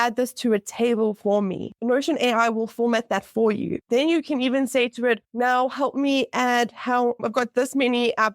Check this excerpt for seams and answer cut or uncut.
cut